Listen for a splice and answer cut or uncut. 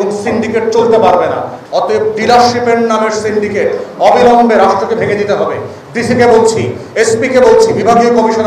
cut